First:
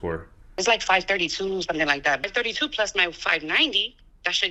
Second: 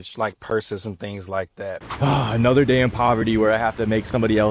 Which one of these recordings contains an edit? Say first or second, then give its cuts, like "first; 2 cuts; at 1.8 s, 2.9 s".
second; 1 cut; at 1.8 s